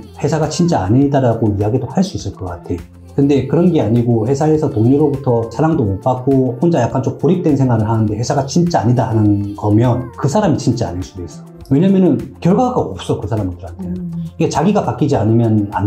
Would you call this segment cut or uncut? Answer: cut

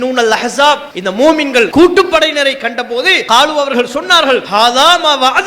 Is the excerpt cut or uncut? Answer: cut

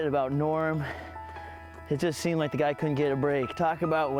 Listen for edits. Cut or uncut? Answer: uncut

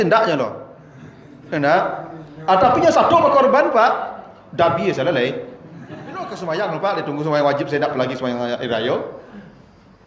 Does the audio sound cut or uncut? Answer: cut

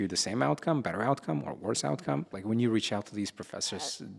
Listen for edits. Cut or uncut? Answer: cut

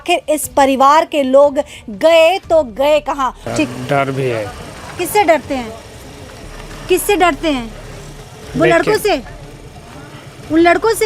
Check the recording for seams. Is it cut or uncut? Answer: cut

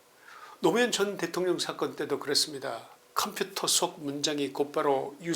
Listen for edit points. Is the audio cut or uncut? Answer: cut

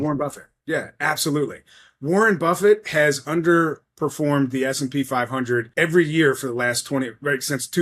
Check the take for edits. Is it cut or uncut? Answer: cut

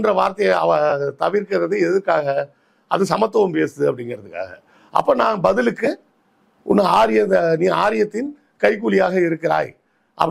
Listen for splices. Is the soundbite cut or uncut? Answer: uncut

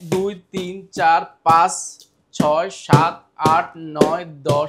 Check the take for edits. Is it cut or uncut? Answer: uncut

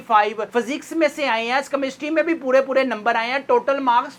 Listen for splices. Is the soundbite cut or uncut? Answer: uncut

